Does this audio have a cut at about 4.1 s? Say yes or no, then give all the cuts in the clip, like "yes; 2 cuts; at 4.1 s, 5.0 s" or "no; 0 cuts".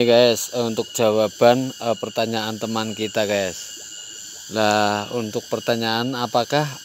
no; 0 cuts